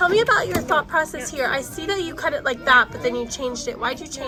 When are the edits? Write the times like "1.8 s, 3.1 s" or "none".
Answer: none